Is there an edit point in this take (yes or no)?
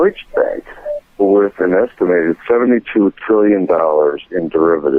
no